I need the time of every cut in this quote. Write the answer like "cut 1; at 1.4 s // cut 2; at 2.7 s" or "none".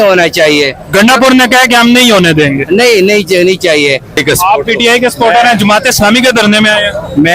cut 1; at 4.2 s